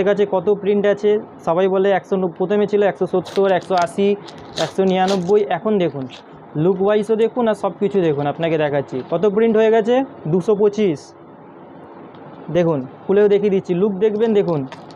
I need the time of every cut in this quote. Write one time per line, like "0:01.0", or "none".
none